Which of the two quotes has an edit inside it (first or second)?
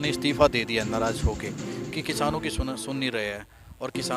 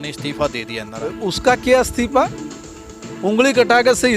second